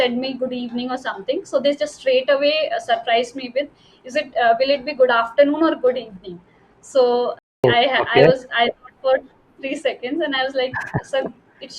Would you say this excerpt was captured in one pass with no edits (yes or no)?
yes